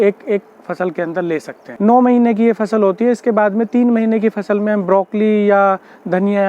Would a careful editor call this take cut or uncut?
cut